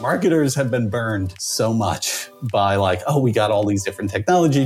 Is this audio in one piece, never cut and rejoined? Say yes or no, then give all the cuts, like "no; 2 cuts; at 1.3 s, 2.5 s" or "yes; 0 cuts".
no; 1 cut; at 1.4 s